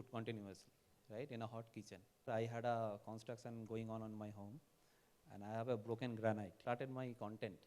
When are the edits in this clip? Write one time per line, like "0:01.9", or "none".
0:02.3
0:06.6